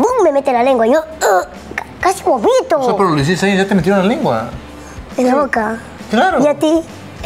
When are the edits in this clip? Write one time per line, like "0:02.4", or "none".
none